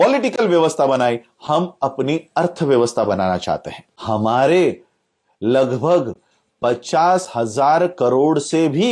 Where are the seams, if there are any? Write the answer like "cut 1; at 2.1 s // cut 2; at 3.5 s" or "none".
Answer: cut 1; at 4.0 s